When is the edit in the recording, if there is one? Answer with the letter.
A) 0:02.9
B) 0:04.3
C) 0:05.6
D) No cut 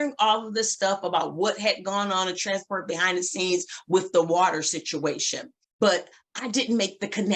C